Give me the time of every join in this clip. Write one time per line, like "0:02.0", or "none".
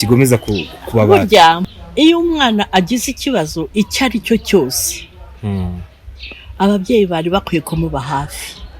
0:01.8